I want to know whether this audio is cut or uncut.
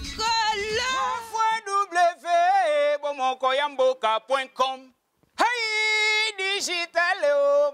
cut